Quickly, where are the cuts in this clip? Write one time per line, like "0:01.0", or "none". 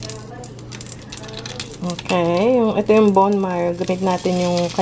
none